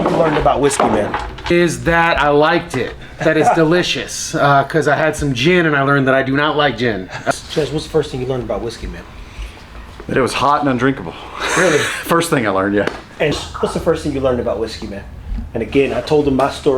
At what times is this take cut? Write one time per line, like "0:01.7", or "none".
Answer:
0:01.5
0:07.3
0:13.4